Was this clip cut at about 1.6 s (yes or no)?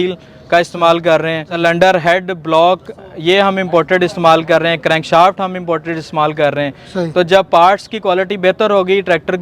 yes